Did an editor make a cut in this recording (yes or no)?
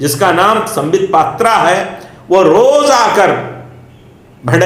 no